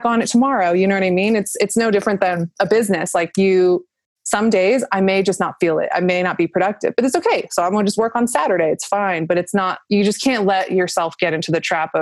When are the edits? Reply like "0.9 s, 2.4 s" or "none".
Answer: none